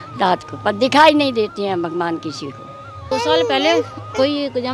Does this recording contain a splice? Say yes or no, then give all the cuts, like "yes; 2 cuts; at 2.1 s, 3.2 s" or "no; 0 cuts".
yes; 1 cut; at 3.1 s